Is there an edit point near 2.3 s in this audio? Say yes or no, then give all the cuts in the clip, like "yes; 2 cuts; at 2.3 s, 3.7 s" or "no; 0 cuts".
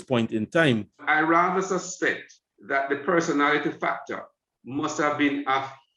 no; 1 cut; at 1.0 s